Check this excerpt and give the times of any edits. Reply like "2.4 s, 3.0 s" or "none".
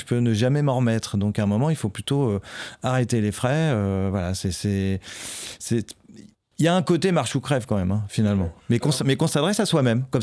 none